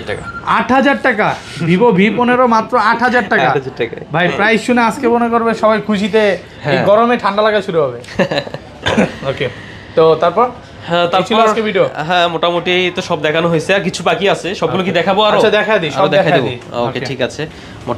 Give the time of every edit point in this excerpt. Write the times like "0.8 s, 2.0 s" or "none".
none